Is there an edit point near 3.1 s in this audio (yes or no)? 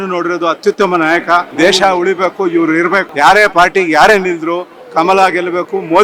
yes